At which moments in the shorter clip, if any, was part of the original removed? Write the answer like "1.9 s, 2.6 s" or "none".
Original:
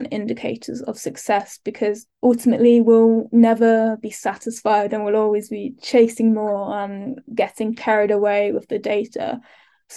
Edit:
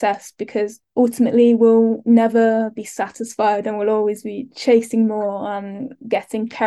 none